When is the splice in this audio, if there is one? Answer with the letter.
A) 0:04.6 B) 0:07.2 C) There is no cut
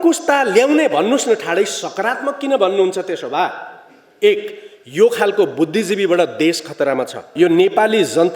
B